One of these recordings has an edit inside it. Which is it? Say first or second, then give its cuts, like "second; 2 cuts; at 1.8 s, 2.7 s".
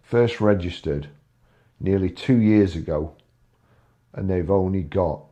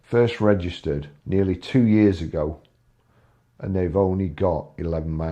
second; 1 cut; at 1.1 s